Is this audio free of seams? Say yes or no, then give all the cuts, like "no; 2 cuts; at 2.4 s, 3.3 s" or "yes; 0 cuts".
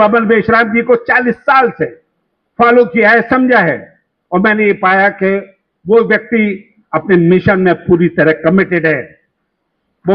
yes; 0 cuts